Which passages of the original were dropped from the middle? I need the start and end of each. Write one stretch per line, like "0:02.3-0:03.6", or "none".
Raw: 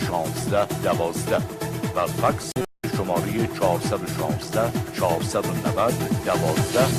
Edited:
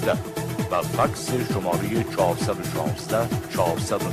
0:02.7-0:02.9